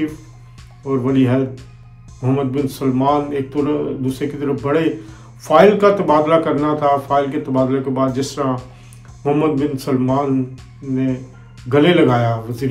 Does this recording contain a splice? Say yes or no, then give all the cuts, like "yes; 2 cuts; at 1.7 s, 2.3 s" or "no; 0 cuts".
no; 0 cuts